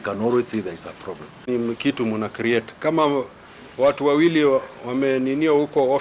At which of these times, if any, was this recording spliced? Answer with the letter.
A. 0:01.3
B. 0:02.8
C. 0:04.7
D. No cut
A